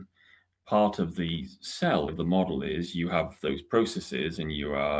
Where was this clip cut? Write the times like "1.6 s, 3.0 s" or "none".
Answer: 2.1 s